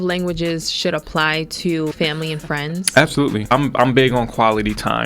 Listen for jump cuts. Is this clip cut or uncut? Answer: cut